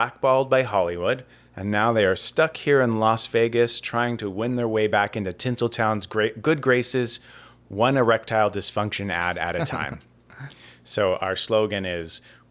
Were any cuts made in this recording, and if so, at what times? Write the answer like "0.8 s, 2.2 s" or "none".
none